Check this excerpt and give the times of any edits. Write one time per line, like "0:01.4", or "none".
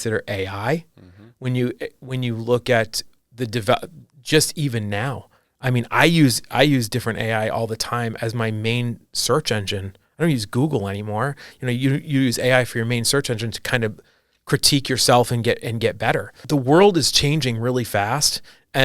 0:16.4